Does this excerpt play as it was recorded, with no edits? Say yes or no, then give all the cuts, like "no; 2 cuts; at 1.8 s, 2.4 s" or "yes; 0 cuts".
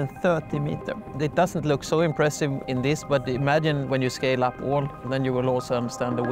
no; 3 cuts; at 1.1 s, 2.6 s, 3.8 s